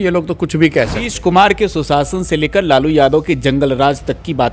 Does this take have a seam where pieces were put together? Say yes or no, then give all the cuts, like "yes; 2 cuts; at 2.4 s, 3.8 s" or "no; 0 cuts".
yes; 1 cut; at 1.1 s